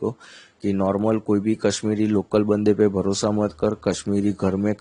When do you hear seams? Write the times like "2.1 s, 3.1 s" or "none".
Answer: none